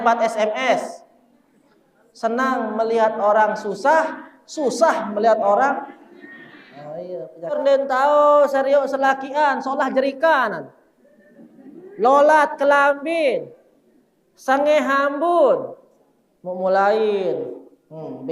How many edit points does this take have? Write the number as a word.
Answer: one